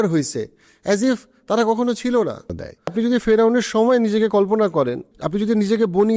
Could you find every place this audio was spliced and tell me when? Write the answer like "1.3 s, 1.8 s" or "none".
2.9 s, 5.1 s